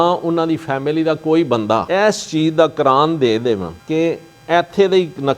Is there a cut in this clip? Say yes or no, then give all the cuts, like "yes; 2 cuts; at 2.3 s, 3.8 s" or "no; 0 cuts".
yes; 1 cut; at 1.8 s